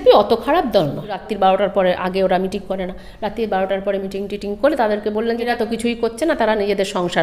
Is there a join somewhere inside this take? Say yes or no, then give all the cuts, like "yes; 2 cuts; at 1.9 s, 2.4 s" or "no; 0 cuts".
yes; 2 cuts; at 1.3 s, 5.5 s